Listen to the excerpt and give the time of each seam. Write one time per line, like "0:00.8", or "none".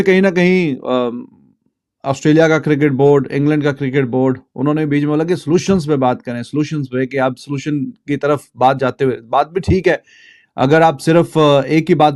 none